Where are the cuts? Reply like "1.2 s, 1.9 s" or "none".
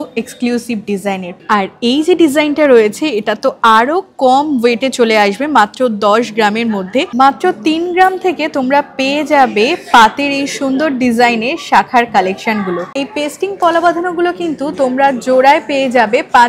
1.5 s, 7.1 s, 12.9 s